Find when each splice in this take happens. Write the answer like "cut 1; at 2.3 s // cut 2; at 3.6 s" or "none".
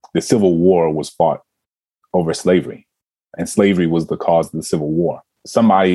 none